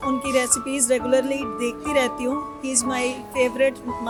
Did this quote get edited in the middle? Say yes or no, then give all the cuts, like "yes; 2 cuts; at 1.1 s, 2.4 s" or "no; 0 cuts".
no; 0 cuts